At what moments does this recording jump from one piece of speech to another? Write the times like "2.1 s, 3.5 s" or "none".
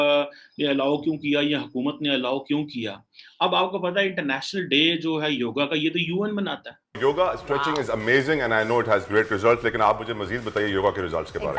7.0 s